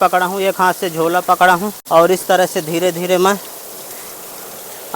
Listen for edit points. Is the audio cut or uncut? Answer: cut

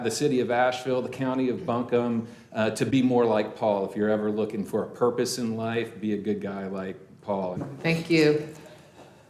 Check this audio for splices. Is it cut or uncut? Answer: cut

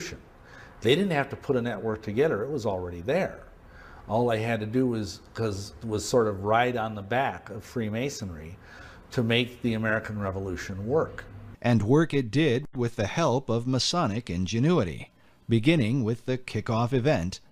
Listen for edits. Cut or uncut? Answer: uncut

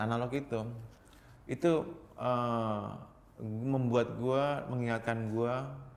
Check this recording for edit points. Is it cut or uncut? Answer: uncut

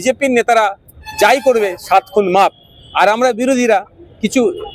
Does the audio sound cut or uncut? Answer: uncut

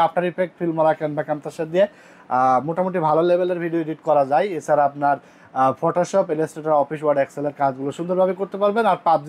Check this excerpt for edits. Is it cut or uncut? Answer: uncut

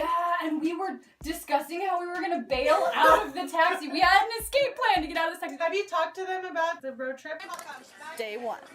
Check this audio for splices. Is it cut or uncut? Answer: cut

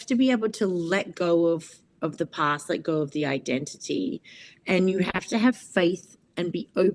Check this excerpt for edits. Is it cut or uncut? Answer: uncut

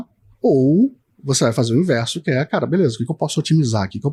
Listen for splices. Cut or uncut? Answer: uncut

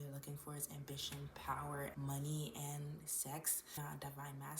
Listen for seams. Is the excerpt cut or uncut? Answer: cut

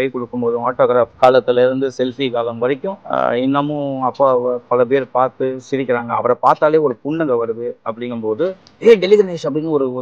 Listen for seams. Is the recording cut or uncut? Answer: cut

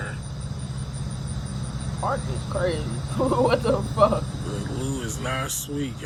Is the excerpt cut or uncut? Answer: uncut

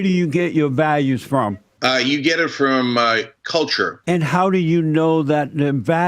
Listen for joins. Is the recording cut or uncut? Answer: cut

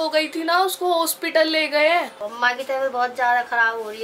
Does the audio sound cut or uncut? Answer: cut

